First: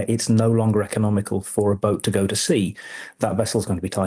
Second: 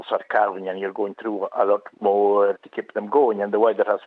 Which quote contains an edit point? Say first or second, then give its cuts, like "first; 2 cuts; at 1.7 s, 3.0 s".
second; 1 cut; at 2.6 s